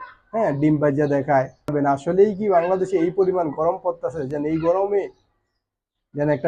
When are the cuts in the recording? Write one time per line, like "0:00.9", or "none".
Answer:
0:01.7